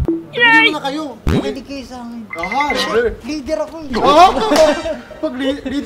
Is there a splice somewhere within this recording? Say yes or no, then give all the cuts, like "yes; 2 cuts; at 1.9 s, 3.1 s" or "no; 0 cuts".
no; 0 cuts